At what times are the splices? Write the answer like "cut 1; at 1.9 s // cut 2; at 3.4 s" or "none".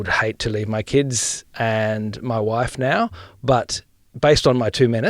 cut 1; at 1.4 s // cut 2; at 4.1 s